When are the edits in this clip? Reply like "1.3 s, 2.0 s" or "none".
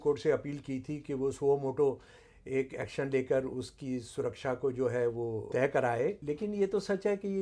5.5 s, 6.2 s